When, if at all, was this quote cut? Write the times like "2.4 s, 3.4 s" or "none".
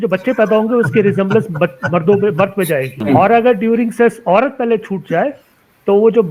none